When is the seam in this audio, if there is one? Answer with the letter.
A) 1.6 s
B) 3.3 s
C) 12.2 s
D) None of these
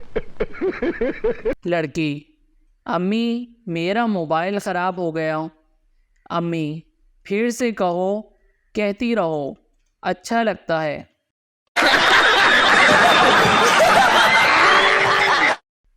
A